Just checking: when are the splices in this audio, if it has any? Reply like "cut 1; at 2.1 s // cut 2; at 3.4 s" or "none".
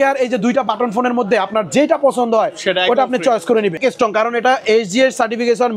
cut 1; at 3.8 s